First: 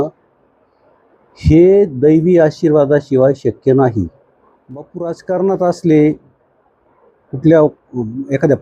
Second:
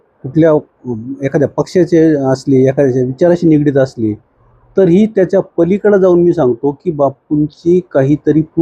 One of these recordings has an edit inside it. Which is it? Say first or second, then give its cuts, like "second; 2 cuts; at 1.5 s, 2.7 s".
first; 1 cut; at 4.9 s